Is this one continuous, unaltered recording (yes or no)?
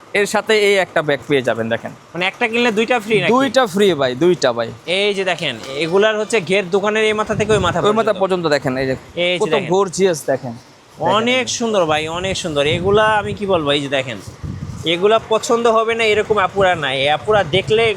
no